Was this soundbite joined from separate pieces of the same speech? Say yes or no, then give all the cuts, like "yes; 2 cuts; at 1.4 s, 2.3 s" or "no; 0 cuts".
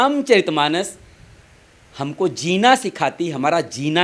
no; 0 cuts